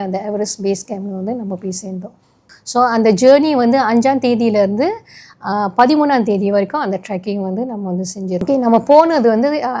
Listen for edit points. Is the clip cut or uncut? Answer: cut